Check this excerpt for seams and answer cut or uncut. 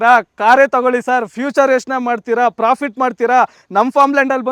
uncut